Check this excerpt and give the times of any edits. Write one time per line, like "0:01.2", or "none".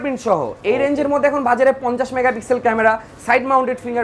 none